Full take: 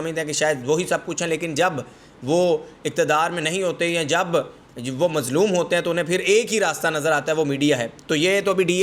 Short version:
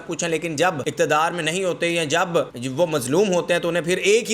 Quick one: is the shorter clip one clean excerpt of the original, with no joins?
no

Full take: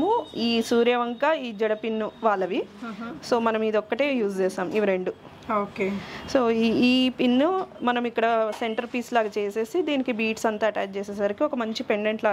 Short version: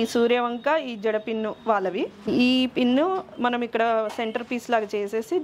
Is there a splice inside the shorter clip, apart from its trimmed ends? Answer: yes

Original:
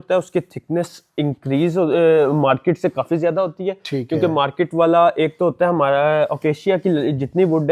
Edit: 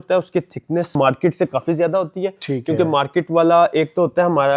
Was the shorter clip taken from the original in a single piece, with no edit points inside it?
no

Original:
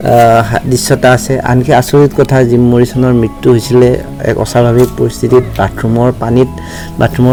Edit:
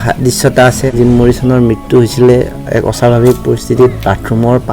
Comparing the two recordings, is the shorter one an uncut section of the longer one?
no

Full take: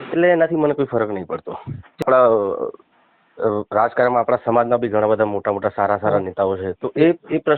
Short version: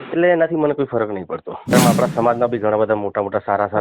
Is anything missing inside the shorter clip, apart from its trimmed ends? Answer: yes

